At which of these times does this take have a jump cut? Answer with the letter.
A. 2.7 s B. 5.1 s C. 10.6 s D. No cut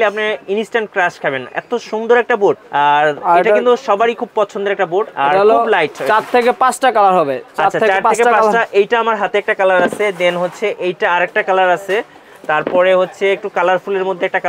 A